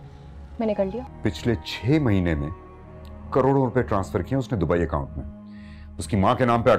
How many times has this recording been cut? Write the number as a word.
one